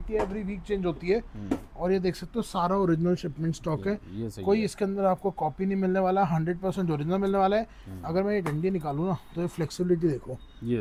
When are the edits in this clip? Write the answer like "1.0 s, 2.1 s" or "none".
none